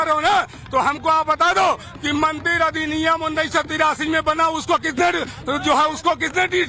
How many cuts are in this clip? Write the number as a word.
one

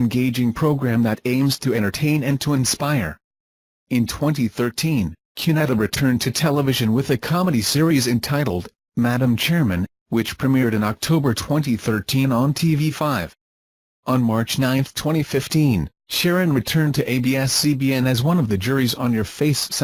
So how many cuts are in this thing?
zero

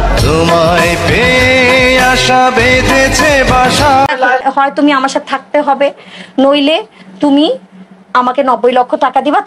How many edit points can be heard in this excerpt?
one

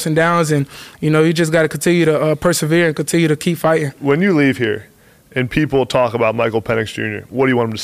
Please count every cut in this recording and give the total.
one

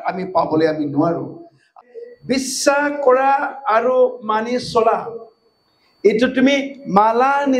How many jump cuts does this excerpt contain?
one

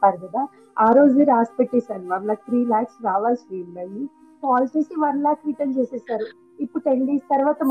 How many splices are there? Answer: one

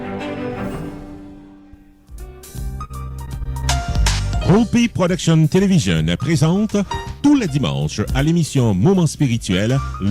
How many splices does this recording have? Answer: one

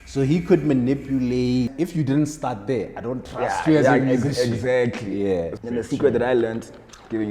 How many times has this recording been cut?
two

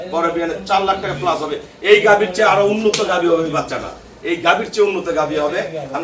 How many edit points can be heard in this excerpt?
zero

